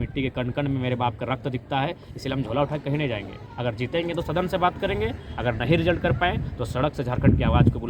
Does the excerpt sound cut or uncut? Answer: uncut